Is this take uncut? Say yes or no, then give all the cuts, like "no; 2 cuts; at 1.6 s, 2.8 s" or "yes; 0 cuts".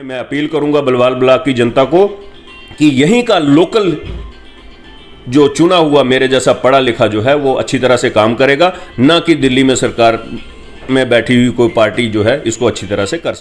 yes; 0 cuts